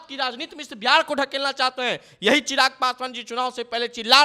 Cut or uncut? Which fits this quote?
uncut